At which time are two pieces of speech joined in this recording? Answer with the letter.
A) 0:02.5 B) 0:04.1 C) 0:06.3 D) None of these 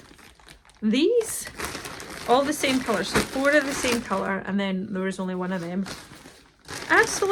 D